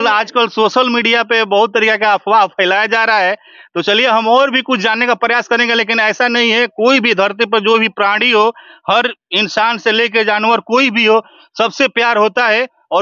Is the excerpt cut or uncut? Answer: uncut